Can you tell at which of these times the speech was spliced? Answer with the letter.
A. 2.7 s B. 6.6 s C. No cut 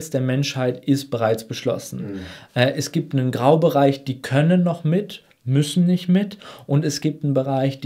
C